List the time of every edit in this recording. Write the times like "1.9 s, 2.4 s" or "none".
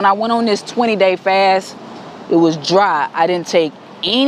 none